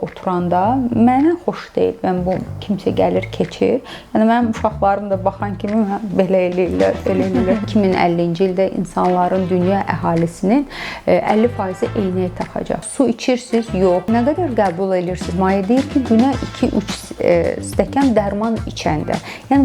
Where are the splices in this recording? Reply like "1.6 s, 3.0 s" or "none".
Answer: 7.7 s, 12.8 s, 14.0 s